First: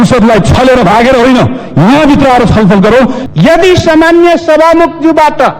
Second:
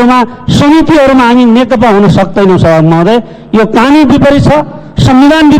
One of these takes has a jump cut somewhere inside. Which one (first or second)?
first